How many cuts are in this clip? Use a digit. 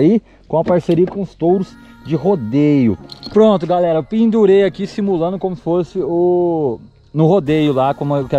1